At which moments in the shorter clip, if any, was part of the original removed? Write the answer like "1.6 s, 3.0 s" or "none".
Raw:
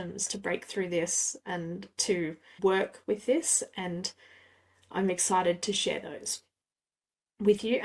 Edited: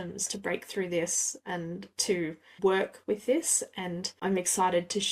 4.1 s